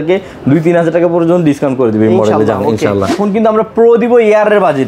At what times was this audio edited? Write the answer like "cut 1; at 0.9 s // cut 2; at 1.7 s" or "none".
cut 1; at 3.1 s

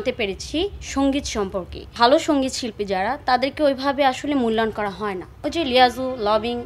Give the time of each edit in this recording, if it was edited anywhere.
cut 1; at 1.9 s // cut 2; at 5.3 s

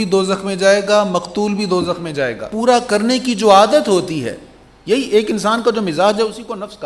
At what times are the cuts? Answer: cut 1; at 2.5 s

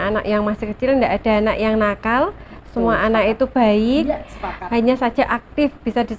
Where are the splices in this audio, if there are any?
none

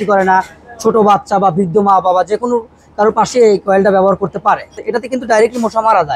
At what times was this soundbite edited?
cut 1; at 4.8 s

